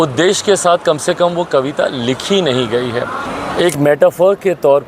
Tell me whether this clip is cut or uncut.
cut